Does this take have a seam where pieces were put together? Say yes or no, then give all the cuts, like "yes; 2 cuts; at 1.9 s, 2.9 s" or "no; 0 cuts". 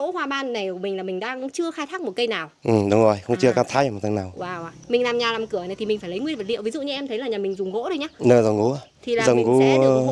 yes; 1 cut; at 4.8 s